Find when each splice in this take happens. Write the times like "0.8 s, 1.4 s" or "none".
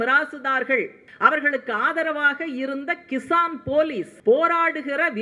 1.0 s, 4.1 s